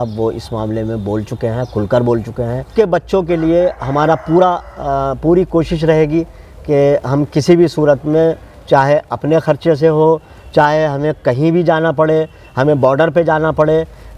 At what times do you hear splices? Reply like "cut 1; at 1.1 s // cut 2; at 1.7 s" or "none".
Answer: cut 1; at 2.7 s